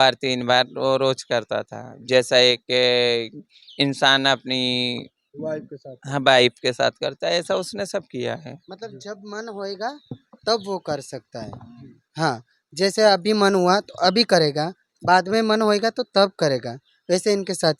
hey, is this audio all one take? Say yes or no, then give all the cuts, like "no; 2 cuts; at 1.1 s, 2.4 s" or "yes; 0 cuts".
yes; 0 cuts